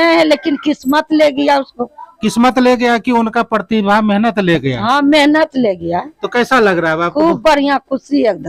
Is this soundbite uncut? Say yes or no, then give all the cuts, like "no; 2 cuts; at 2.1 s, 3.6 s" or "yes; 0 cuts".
yes; 0 cuts